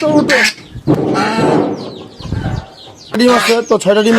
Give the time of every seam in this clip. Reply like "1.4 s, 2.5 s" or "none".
0.9 s, 3.2 s